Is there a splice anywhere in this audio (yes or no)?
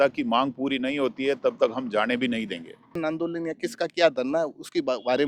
yes